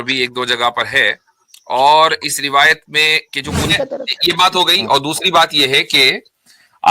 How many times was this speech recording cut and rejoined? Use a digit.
1